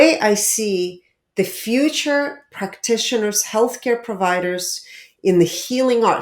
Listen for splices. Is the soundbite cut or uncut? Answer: uncut